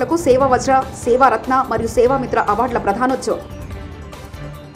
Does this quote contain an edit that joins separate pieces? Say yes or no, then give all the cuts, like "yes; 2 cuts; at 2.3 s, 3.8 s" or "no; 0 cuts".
no; 0 cuts